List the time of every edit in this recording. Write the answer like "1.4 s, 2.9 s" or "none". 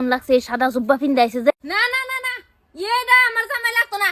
1.5 s